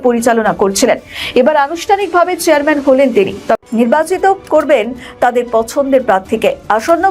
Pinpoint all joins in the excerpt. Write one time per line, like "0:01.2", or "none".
0:03.6